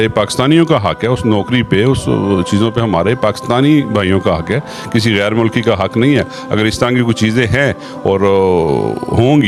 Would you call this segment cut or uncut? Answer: uncut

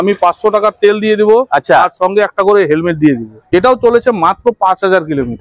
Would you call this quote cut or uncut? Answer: cut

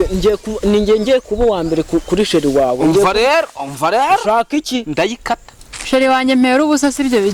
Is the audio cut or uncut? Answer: cut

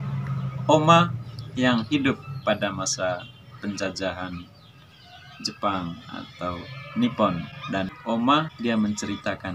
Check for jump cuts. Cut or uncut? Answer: cut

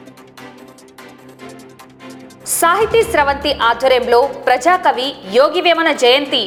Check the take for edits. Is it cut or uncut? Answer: uncut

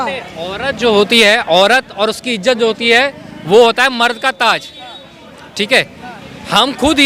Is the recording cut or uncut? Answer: uncut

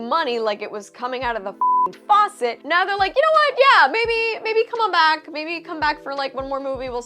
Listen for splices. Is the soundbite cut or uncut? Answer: cut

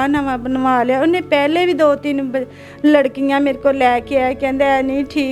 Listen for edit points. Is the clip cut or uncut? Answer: uncut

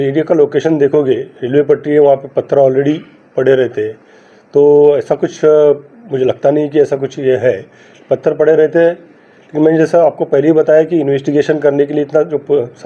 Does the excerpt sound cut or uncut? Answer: uncut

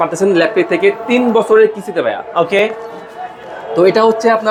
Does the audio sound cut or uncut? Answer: uncut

